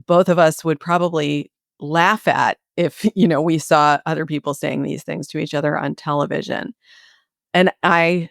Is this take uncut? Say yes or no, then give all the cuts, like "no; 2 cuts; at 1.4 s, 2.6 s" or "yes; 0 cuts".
no; 1 cut; at 7.3 s